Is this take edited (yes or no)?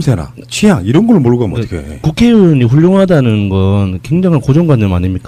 no